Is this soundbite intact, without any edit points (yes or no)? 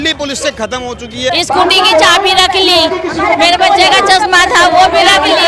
no